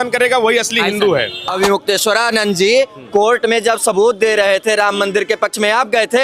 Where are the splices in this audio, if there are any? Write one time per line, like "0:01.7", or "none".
0:01.4